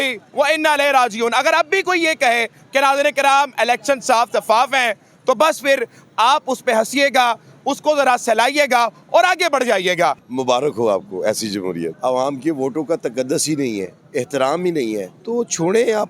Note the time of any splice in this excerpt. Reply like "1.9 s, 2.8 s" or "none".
10.2 s, 12.0 s, 15.1 s